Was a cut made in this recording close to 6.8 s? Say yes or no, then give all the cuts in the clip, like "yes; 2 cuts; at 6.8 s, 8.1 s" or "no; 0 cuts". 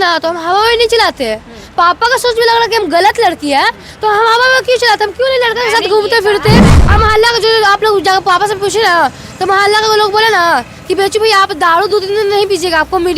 yes; 1 cut; at 6.8 s